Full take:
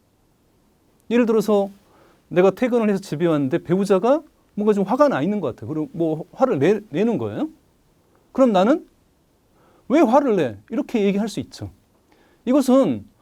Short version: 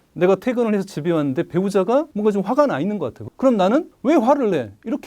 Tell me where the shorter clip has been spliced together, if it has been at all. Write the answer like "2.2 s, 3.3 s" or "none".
2.1 s, 3.2 s, 3.9 s